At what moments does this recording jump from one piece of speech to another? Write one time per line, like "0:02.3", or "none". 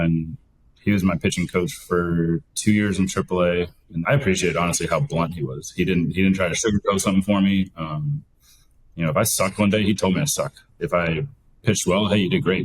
0:03.9